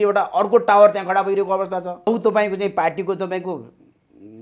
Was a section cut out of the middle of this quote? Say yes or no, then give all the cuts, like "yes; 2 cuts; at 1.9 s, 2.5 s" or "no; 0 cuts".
yes; 1 cut; at 2.1 s